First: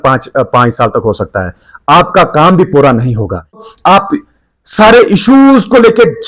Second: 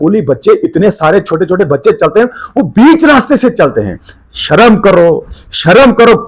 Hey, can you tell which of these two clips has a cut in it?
first; 1 cut; at 3.6 s

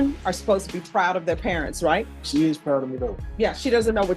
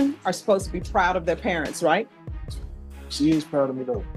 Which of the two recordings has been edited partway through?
first; 2 cuts; at 2.2 s, 3.2 s

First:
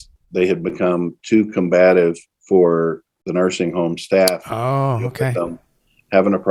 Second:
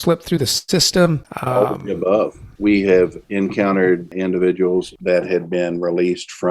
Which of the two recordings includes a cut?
second; 5 cuts; at 1.3 s, 2.4 s, 3.2 s, 4.1 s, 4.9 s

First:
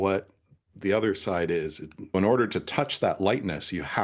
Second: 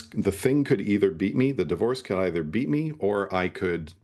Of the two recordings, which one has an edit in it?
first; 1 cut; at 2.1 s

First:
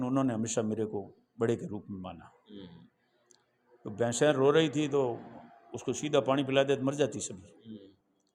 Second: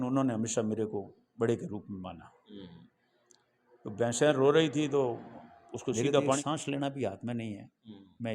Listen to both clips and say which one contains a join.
second; 1 cut; at 6.4 s

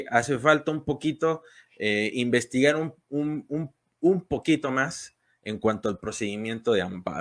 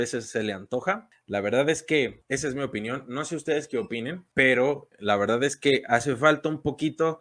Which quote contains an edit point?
second; 4 cuts; at 1.1 s, 2.2 s, 4.2 s, 4.9 s

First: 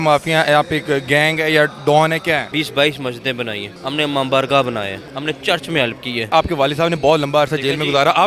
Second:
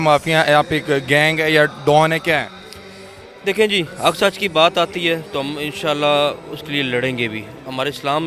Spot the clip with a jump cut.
first; 4 cuts; at 2.5 s, 3.7 s, 5.0 s, 6.3 s

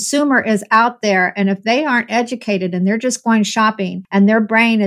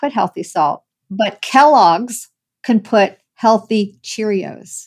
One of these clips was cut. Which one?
first; 1 cut; at 3.9 s

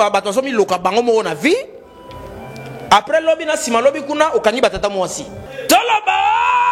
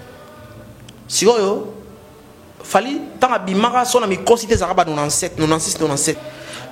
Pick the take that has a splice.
first; 1 cut; at 5.3 s

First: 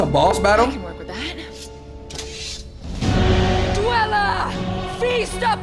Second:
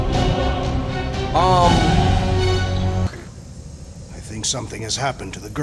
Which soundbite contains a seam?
second; 1 cut; at 3.1 s

